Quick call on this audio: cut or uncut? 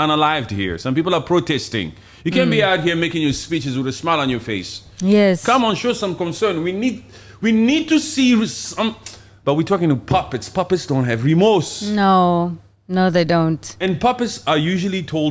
uncut